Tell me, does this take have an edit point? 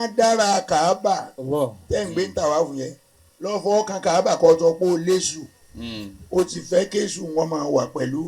no; 0 cuts

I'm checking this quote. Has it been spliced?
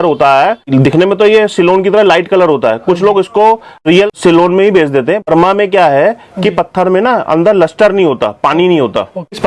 no; 0 cuts

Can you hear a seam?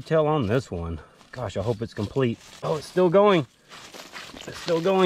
yes; 1 cut; at 2.5 s

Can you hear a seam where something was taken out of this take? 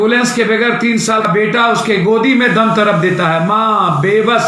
yes; 1 cut; at 1.2 s

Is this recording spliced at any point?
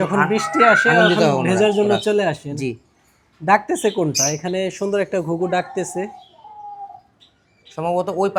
no; 0 cuts

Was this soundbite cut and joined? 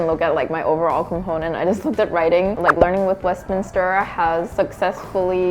yes; 1 cut; at 2.5 s

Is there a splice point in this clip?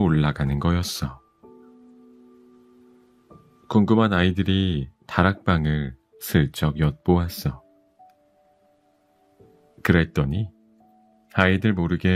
yes; 2 cuts; at 1.3 s, 3.0 s

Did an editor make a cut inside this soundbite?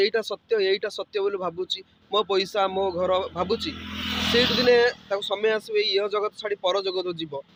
no; 0 cuts

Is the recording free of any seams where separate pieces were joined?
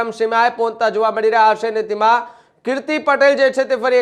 yes; 0 cuts

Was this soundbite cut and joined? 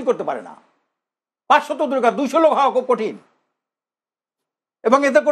no; 0 cuts

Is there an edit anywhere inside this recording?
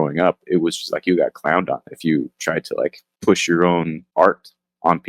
yes; 2 cuts; at 3.1 s, 4.0 s

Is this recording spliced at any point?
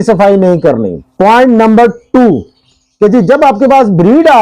yes; 1 cut; at 1.0 s

